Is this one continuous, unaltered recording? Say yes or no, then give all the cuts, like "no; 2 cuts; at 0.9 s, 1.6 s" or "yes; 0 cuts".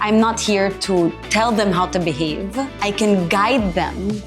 no; 2 cuts; at 1.2 s, 2.7 s